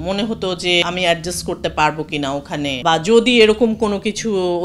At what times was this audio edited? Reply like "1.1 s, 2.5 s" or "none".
0.8 s, 2.8 s